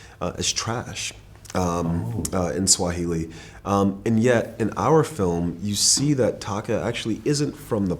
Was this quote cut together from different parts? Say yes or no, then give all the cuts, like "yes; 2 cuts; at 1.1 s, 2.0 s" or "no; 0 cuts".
no; 0 cuts